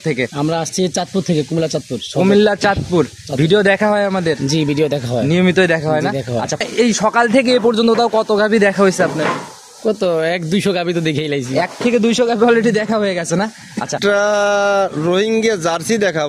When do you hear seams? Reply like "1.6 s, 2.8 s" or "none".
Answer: 6.6 s, 14.0 s